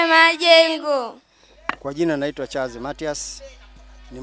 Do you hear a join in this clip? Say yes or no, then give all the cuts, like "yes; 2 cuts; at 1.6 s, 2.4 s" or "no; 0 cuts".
no; 0 cuts